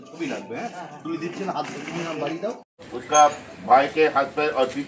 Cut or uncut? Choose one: cut